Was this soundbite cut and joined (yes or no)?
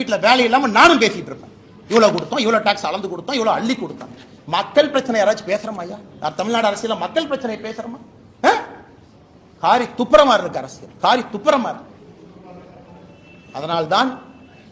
no